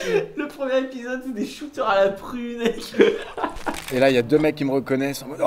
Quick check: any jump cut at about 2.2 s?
no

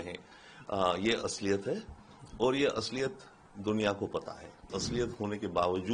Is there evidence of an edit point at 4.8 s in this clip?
yes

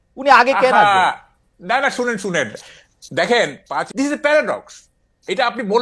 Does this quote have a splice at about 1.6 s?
no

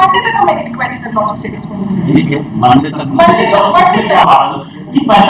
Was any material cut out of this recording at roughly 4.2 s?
yes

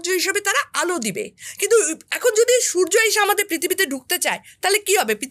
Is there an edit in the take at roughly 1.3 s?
no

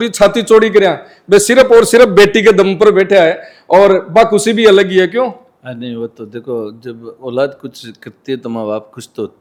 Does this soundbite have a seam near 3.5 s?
no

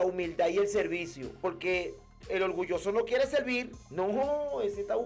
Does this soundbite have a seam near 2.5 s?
no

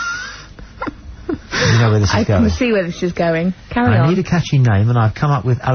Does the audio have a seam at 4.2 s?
yes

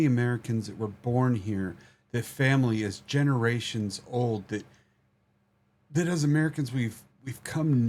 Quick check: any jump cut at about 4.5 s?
no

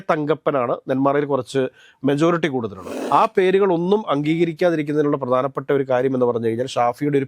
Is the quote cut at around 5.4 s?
no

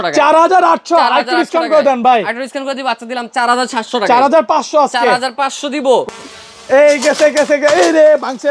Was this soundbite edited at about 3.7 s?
no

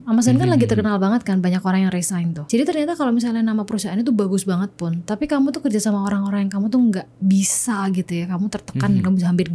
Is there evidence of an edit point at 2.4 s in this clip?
yes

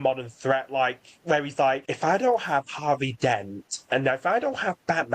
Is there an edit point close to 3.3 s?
no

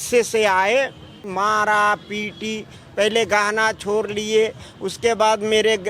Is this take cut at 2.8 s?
no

